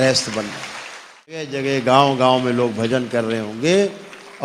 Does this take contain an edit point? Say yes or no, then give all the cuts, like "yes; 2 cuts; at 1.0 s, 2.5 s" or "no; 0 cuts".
yes; 1 cut; at 1.5 s